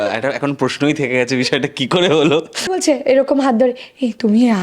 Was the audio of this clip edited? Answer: yes; 1 cut; at 2.7 s

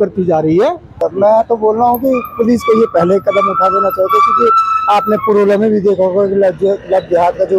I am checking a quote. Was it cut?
yes; 1 cut; at 1.1 s

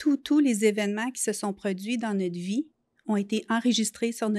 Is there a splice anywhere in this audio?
no; 0 cuts

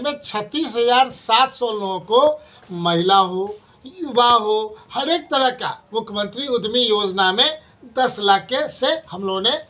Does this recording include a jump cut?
no; 0 cuts

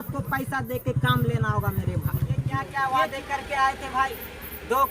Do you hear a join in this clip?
yes; 1 cut; at 2.6 s

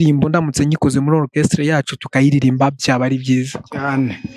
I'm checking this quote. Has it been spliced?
no; 0 cuts

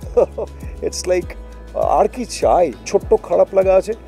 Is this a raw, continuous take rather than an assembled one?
no; 1 cut; at 2.9 s

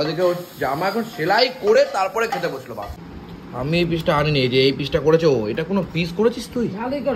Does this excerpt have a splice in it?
yes; 1 cut; at 2.9 s

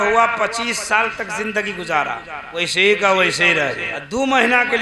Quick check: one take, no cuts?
no; 2 cuts; at 2.4 s, 3.9 s

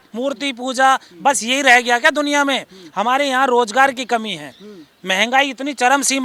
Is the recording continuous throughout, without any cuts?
yes; 0 cuts

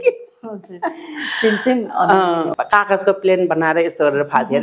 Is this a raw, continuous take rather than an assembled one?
no; 1 cut; at 2.5 s

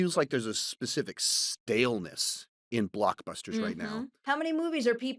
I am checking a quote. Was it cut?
yes; 1 cut; at 4.1 s

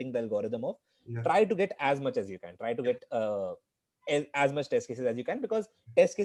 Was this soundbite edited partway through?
no; 0 cuts

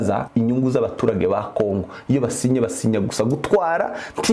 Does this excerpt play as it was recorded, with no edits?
yes; 0 cuts

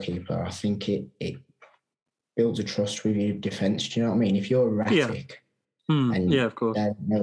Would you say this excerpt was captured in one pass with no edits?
yes; 0 cuts

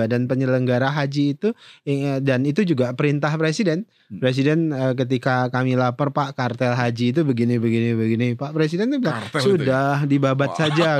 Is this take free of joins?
yes; 0 cuts

